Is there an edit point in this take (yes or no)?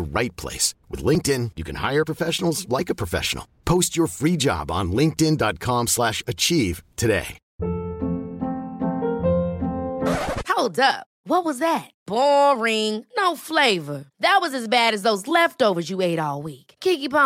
yes